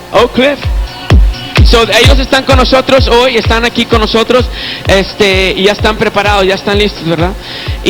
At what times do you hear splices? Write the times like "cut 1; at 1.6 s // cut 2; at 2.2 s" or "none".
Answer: cut 1; at 3.0 s